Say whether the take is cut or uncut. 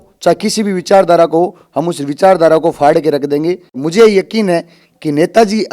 cut